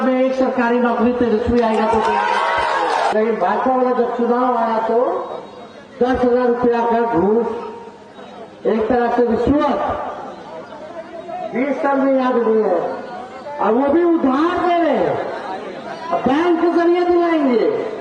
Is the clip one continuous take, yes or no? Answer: no